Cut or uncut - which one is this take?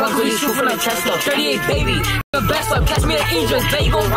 uncut